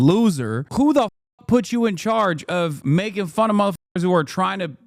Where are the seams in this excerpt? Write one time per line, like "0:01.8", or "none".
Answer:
none